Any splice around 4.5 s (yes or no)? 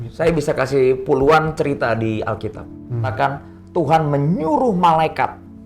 no